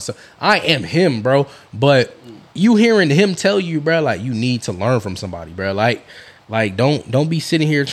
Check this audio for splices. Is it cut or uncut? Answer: uncut